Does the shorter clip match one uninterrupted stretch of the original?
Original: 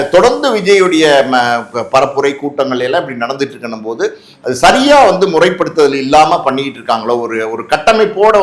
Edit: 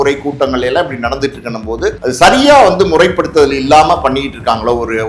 no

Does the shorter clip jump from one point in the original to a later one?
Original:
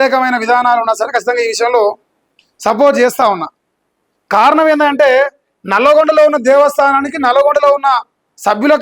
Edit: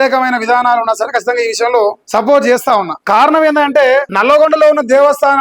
yes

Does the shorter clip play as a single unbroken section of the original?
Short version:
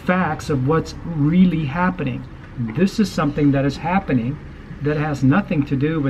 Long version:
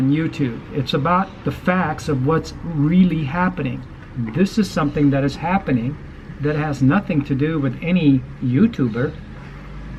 yes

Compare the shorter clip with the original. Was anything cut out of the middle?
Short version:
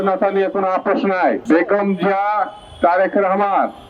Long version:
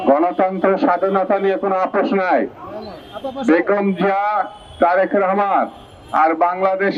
yes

